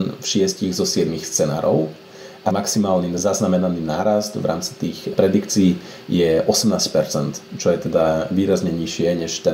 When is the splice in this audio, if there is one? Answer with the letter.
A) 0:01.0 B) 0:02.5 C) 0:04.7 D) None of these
B